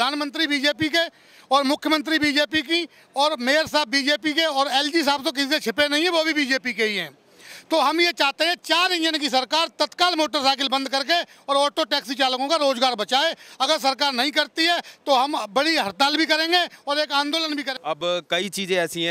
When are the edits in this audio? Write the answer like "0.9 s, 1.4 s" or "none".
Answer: 17.7 s